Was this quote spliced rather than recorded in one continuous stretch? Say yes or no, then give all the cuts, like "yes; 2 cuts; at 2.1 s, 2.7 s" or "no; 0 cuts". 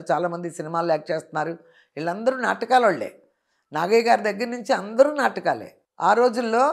yes; 1 cut; at 5.7 s